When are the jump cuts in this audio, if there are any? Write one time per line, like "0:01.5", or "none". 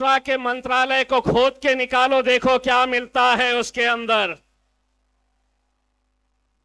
none